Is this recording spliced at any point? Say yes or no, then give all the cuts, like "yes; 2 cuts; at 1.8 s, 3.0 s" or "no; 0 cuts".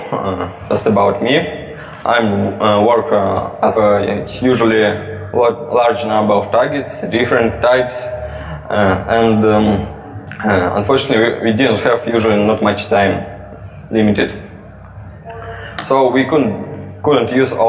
no; 0 cuts